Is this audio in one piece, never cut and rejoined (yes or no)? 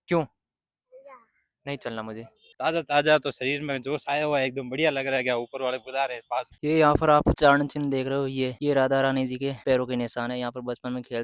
no